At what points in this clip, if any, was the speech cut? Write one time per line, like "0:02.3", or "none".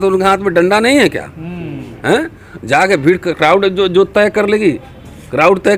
none